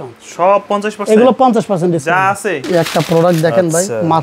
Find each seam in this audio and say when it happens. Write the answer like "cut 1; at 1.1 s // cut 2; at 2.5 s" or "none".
cut 1; at 2.6 s